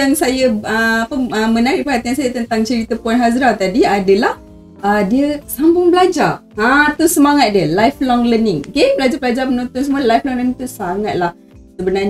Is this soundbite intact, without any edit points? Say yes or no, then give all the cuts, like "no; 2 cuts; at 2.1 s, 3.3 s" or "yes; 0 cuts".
yes; 0 cuts